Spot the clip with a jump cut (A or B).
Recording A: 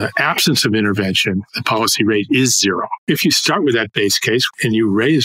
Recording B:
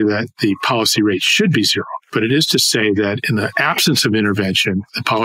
A